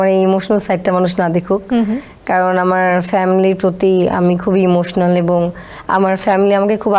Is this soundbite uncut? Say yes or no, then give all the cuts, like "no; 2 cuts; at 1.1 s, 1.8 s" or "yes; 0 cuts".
yes; 0 cuts